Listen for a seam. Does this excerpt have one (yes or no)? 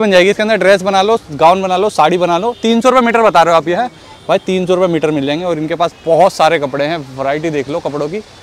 no